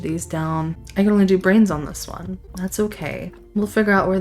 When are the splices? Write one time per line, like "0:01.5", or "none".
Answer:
0:00.8
0:02.5